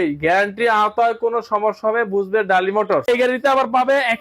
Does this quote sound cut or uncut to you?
cut